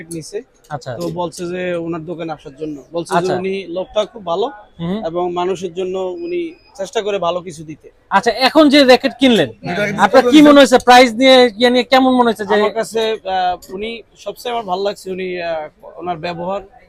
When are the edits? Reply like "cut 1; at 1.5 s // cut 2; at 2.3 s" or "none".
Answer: none